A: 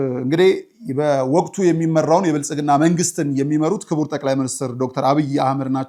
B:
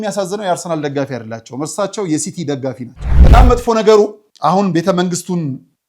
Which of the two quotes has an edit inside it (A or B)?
B